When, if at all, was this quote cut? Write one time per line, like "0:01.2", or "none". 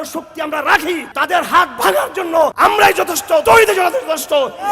0:01.1
0:02.5
0:03.4